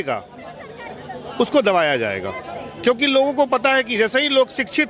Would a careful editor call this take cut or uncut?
uncut